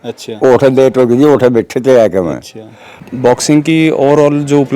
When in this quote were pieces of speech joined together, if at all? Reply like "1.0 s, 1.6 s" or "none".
3.0 s